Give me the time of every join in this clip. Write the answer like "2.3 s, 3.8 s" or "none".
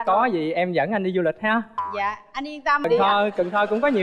2.8 s